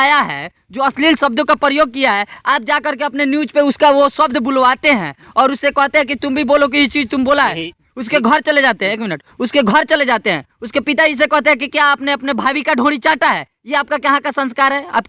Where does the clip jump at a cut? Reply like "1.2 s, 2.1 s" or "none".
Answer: none